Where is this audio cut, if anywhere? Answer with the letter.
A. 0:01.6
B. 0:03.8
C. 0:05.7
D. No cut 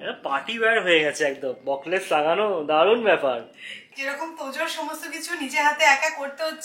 B